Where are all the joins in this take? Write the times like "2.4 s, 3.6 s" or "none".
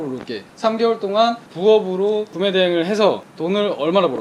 3.3 s

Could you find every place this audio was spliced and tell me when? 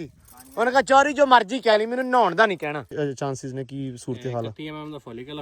2.9 s

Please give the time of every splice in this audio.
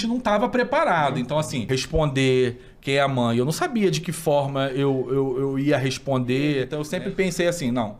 1.6 s, 6.8 s

